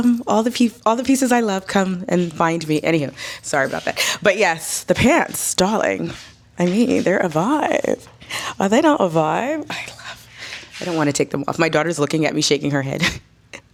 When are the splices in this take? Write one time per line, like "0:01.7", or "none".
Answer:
none